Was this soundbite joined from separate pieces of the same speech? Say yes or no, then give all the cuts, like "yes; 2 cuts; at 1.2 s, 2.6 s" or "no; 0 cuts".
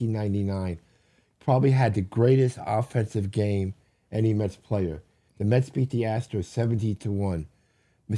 no; 0 cuts